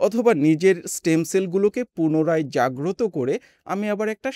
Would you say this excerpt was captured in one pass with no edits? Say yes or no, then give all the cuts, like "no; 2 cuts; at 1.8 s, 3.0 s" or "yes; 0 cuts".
yes; 0 cuts